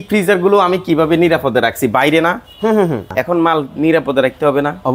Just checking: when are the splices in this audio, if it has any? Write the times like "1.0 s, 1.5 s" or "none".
3.1 s